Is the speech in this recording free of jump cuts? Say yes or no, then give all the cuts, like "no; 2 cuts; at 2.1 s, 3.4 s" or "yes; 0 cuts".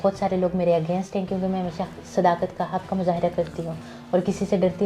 yes; 0 cuts